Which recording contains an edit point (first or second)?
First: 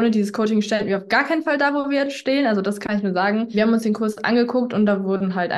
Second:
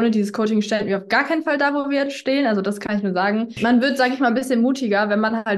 second